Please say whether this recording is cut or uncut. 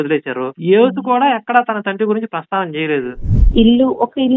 cut